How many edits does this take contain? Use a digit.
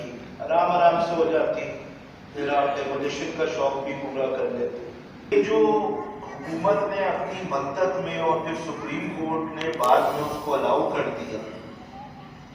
1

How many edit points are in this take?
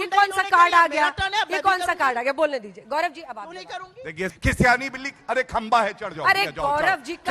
1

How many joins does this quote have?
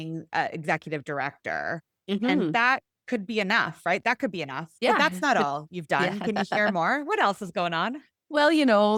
0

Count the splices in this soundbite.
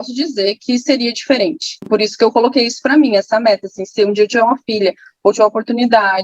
0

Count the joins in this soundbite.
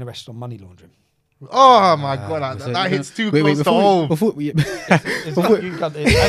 0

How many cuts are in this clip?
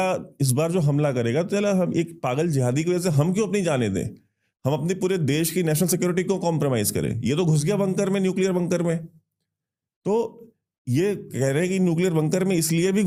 0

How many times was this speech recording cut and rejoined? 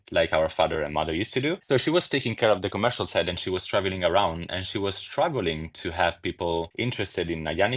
0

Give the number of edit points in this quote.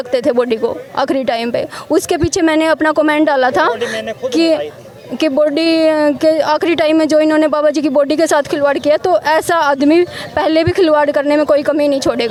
0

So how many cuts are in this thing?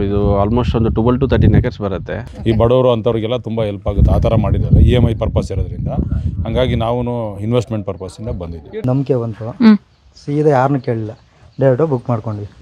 2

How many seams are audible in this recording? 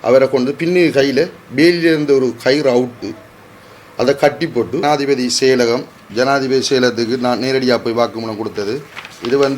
1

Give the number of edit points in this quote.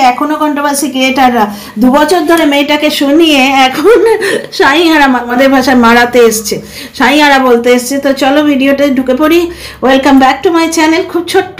1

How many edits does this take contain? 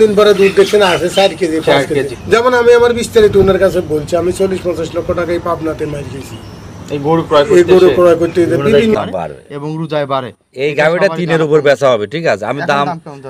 2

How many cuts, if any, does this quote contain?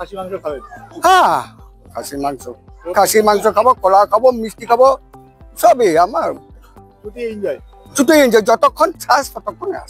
0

